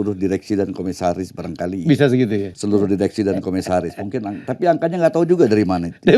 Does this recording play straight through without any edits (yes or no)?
no